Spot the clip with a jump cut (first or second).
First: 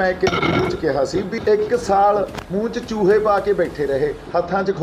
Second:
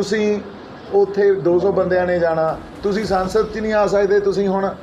first